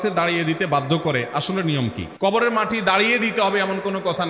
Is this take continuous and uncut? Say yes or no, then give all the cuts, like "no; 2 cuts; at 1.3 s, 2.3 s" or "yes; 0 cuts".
yes; 0 cuts